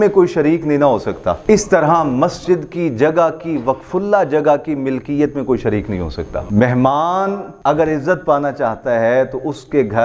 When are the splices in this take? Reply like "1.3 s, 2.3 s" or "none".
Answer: 1.4 s, 6.4 s, 7.5 s